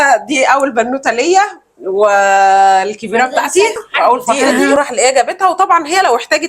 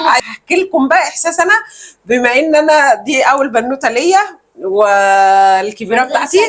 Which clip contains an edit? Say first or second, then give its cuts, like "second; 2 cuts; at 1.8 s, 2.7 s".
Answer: first; 1 cut; at 4.7 s